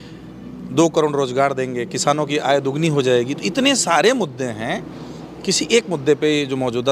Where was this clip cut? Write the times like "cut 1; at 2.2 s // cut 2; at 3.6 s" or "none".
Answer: none